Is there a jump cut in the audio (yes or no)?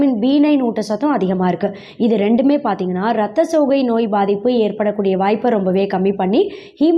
no